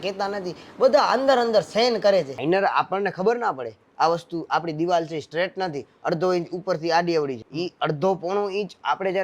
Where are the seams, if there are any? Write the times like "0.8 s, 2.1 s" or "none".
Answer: 2.3 s, 7.4 s